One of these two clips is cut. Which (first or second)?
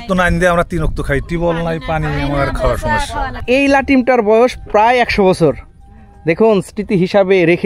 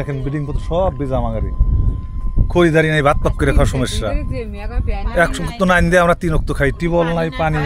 first